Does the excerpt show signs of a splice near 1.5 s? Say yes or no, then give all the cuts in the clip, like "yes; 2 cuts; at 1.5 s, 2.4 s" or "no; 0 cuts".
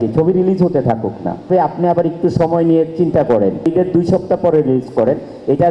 yes; 2 cuts; at 1.5 s, 3.7 s